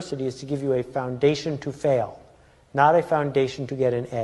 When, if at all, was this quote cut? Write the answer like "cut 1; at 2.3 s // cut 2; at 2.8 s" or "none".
none